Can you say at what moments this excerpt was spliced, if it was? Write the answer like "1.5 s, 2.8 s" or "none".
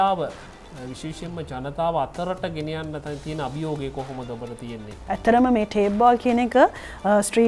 5.0 s